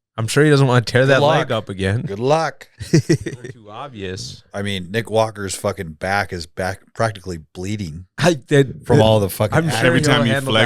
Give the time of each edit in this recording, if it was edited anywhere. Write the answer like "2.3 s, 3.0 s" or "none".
3.6 s